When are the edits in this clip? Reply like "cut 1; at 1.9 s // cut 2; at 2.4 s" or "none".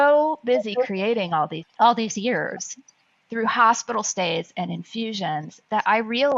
cut 1; at 1.6 s

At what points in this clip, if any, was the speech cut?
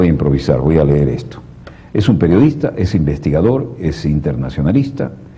cut 1; at 2.3 s

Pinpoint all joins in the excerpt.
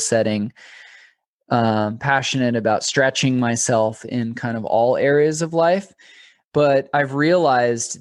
none

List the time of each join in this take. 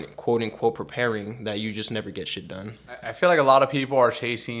cut 1; at 3.1 s

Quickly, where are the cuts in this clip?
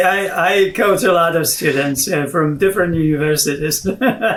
none

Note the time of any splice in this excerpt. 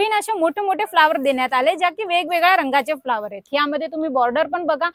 none

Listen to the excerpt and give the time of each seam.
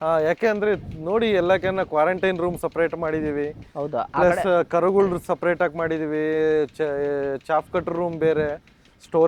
none

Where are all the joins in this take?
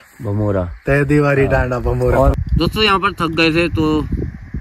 cut 1; at 2.3 s

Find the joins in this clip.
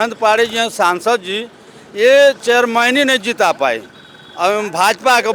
none

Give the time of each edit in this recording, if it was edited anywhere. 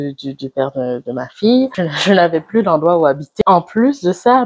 cut 1; at 1.8 s // cut 2; at 3.4 s

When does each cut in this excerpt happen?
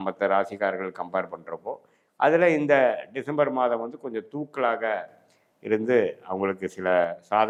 none

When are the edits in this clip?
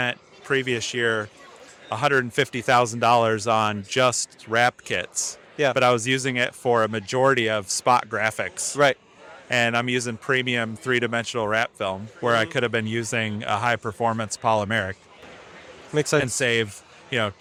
none

